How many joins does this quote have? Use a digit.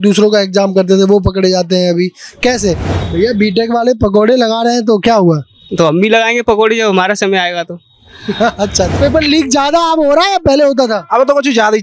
2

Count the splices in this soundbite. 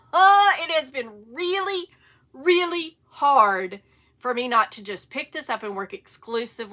0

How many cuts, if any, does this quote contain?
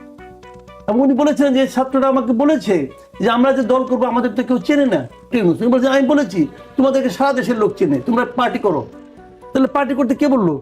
1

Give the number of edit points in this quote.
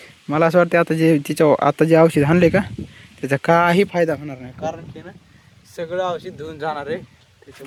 0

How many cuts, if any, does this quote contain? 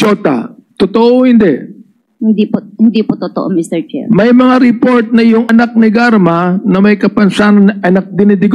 0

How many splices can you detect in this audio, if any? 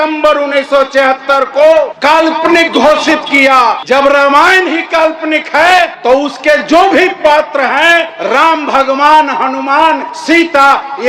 5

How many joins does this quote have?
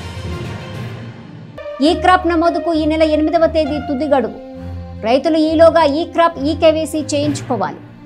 1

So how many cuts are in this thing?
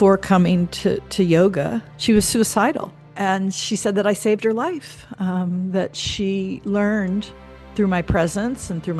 2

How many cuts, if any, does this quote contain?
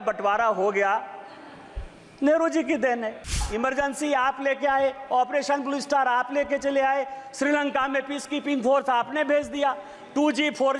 1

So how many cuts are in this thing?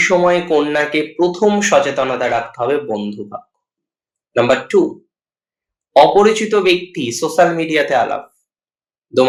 0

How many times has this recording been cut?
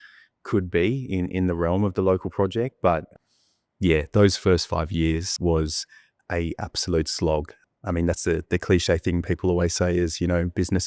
3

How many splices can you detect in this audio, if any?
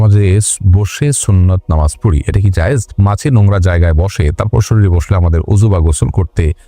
1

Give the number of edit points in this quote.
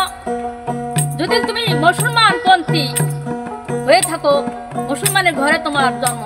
0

